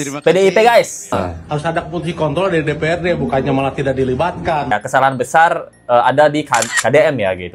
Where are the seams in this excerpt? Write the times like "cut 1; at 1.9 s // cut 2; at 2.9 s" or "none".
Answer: cut 1; at 1.1 s // cut 2; at 4.7 s